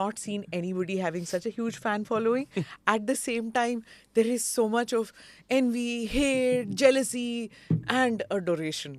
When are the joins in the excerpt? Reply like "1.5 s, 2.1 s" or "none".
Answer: none